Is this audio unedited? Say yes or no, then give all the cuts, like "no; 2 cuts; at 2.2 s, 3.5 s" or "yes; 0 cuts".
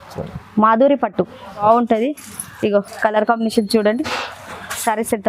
no; 1 cut; at 1.6 s